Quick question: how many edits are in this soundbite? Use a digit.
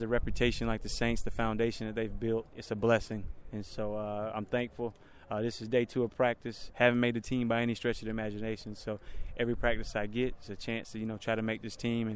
2